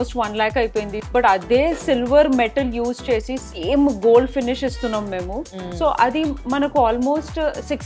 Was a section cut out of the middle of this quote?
yes; 1 cut; at 1.0 s

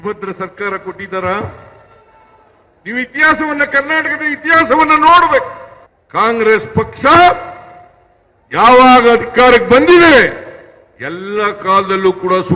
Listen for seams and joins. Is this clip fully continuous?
yes; 0 cuts

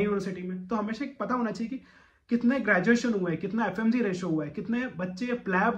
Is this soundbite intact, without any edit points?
yes; 0 cuts

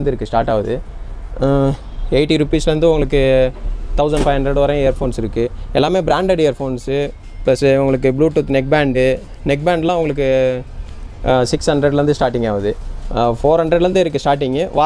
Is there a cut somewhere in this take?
no; 0 cuts

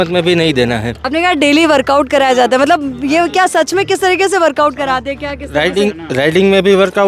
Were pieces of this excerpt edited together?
yes; 1 cut; at 1.0 s

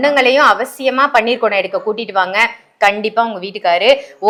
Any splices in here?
no; 0 cuts

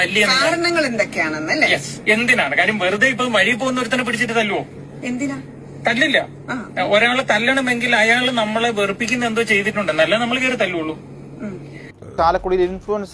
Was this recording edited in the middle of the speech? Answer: yes; 1 cut; at 12.2 s

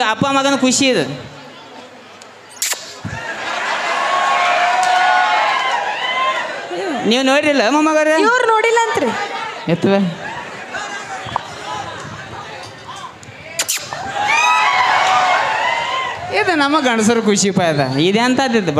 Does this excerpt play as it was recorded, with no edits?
yes; 0 cuts

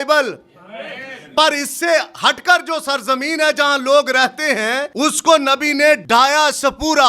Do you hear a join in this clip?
yes; 2 cuts; at 4.9 s, 6.0 s

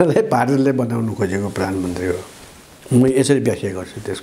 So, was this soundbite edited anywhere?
no; 0 cuts

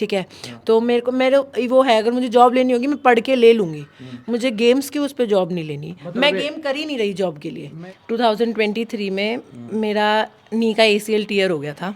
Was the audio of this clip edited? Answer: yes; 1 cut; at 7.7 s

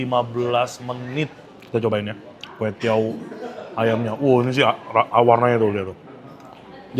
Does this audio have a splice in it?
yes; 1 cut; at 1.4 s

